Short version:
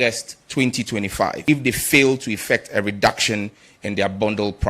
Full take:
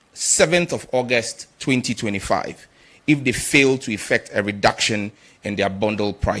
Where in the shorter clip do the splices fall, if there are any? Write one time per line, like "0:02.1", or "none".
0:01.4